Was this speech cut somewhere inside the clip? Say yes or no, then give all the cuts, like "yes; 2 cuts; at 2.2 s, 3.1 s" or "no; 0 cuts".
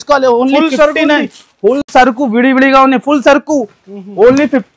no; 0 cuts